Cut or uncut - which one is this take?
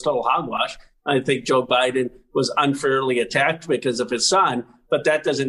uncut